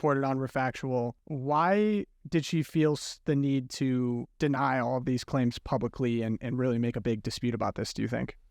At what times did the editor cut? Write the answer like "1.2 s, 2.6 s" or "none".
1.3 s, 4.3 s